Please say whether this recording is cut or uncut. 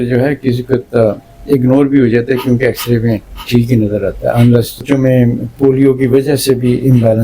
cut